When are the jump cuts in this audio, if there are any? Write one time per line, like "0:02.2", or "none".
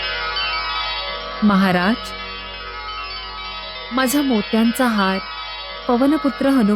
none